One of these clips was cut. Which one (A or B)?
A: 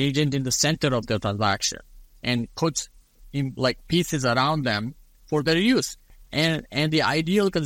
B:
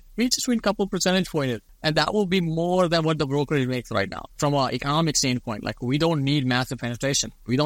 B